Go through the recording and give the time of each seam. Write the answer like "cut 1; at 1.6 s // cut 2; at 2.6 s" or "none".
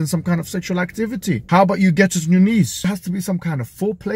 cut 1; at 2.9 s